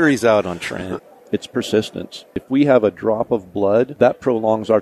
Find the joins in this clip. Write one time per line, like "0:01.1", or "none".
0:01.0
0:02.4
0:03.9